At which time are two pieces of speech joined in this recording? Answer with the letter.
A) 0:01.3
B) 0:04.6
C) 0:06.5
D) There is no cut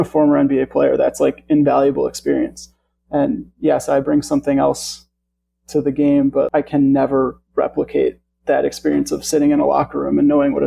C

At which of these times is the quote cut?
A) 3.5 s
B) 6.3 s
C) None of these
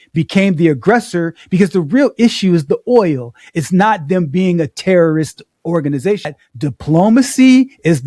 B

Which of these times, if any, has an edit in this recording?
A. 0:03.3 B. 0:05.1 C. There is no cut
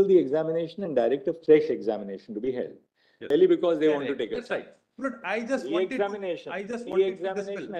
A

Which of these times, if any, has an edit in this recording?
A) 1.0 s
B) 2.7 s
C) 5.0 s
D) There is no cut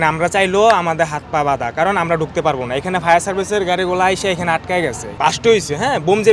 C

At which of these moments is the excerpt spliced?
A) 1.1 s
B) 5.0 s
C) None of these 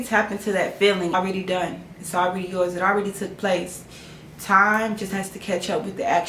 A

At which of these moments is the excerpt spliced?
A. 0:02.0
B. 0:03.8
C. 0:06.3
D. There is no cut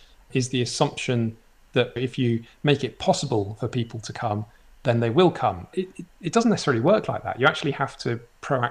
A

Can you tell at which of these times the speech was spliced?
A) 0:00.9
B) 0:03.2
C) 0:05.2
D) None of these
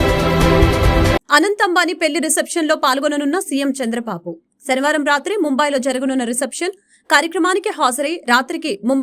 A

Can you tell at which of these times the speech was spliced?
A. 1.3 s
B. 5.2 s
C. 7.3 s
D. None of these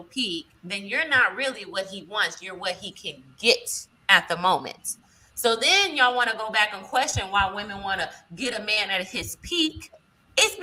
D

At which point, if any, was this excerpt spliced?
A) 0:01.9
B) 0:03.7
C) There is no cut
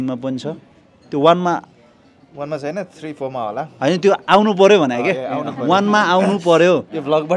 C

